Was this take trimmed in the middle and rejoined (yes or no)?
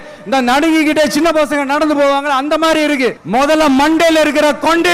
yes